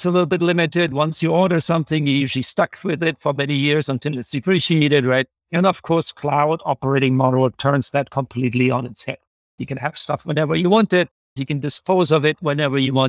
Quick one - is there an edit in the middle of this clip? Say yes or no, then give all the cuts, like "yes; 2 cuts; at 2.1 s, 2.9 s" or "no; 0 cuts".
yes; 1 cut; at 5.4 s